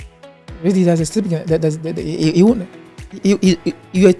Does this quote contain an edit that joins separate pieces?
no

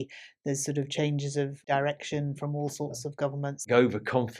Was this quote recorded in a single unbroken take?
no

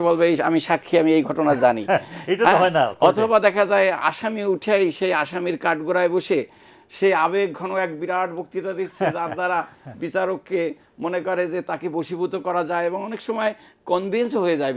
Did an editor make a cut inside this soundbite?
no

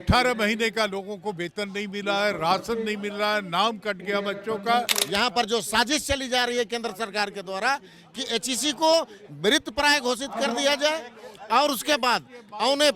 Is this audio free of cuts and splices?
no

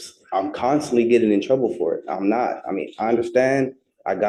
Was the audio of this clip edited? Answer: no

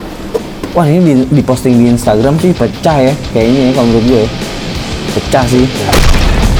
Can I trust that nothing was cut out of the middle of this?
yes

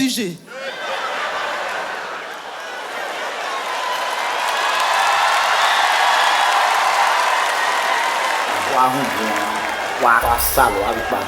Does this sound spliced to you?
yes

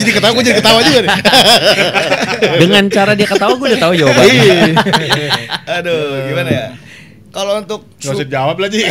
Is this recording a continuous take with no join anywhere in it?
yes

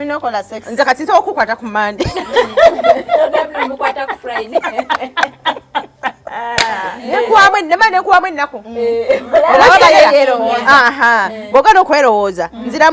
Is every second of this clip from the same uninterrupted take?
no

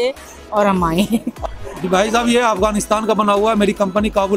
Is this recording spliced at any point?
yes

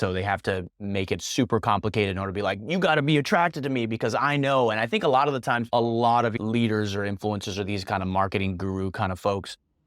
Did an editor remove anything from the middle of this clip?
yes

